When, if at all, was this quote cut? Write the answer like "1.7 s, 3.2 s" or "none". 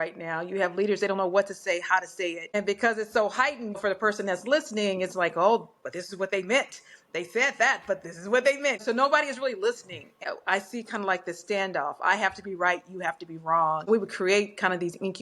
2.6 s, 3.8 s, 8.8 s, 10.2 s, 13.9 s